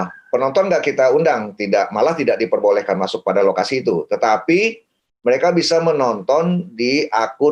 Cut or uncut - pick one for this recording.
uncut